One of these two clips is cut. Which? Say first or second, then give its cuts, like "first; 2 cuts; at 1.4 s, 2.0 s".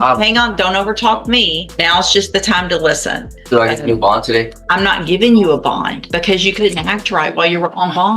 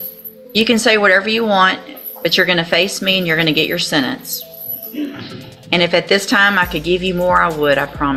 first; 4 cuts; at 1.6 s, 3.3 s, 4.6 s, 6.0 s